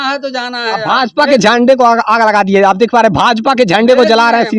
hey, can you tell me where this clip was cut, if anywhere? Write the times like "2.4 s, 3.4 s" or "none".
none